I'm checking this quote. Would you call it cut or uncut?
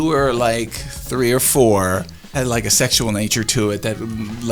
cut